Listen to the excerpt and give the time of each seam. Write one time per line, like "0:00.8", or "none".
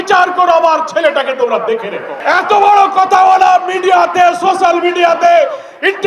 0:02.1